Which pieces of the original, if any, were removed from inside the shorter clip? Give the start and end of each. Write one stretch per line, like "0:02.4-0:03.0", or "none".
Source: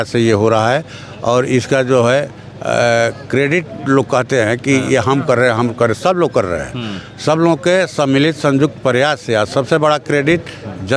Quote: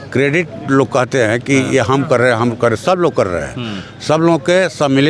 none

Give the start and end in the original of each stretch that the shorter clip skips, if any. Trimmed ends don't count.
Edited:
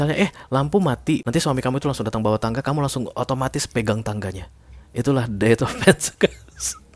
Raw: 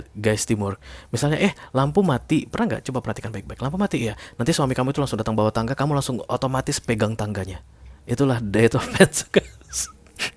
0:02.5-0:04.4

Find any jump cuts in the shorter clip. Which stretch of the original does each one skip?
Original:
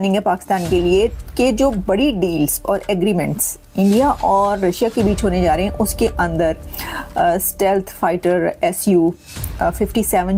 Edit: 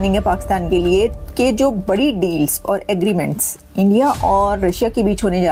none

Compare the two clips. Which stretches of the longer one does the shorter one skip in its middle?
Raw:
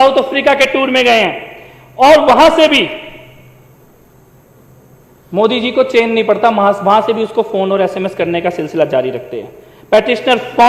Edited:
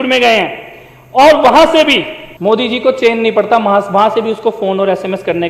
0:03.1-0:05.1

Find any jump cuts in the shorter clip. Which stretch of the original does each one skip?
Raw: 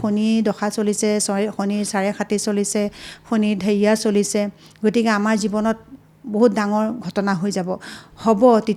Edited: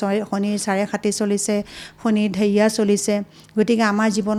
none

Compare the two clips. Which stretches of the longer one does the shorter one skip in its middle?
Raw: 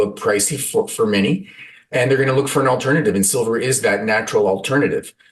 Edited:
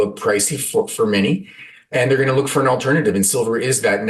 none

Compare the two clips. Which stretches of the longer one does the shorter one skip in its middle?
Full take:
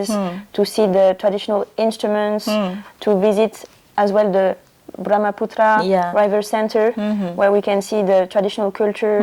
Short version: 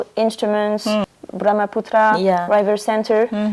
0:02.8-0:04.9

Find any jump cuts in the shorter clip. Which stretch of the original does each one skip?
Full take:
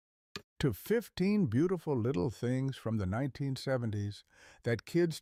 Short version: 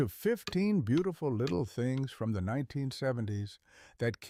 none

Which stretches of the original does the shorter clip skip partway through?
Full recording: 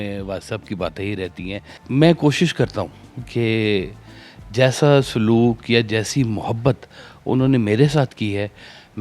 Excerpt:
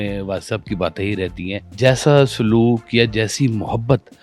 0:01.6-0:04.4

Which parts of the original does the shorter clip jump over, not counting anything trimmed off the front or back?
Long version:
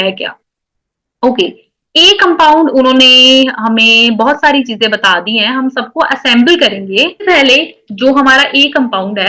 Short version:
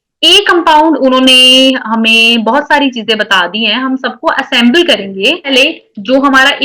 0:07.2-0:07.4

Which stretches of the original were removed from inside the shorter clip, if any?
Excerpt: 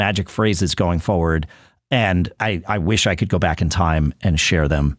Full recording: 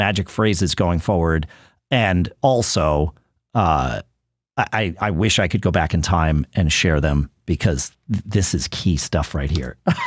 0:02.4-0:04.7

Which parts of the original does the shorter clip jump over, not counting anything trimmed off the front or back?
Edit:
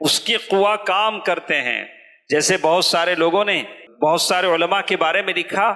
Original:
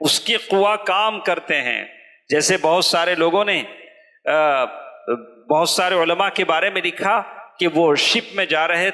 0:03.8-0:05.3

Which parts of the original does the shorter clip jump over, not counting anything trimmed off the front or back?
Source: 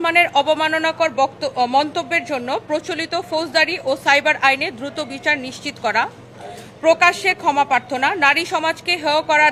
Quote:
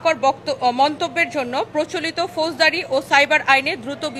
none

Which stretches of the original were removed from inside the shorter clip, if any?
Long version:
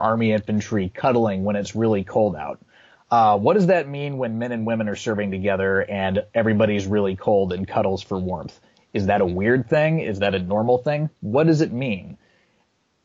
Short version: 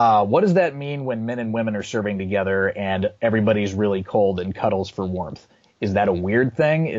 none

